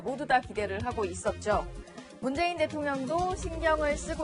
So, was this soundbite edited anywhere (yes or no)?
no